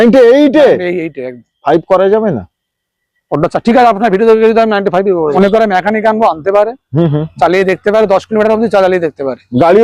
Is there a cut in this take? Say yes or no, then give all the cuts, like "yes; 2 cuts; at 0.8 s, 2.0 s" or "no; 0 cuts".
yes; 1 cut; at 5.3 s